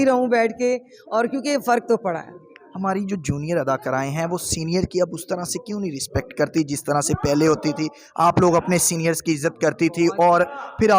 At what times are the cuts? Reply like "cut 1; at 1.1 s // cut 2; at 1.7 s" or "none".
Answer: none